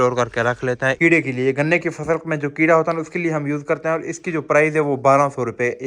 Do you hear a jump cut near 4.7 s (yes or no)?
no